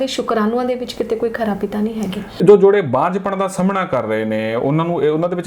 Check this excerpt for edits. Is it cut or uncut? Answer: cut